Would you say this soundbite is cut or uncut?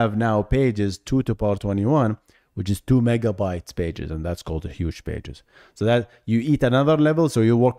uncut